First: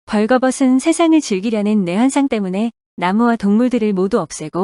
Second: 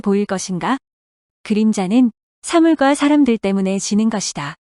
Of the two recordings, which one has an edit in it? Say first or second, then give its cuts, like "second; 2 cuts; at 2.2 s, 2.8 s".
second; 1 cut; at 3.4 s